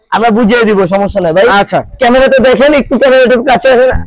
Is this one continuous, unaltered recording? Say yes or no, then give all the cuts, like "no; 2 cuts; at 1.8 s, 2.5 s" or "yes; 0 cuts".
yes; 0 cuts